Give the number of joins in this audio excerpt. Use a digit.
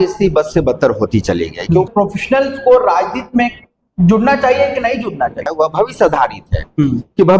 2